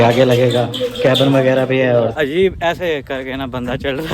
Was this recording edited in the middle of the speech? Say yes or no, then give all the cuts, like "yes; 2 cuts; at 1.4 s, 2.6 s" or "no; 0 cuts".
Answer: yes; 1 cut; at 2.1 s